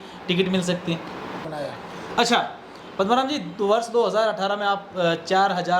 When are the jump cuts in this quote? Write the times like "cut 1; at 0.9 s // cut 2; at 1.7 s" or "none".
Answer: cut 1; at 1.5 s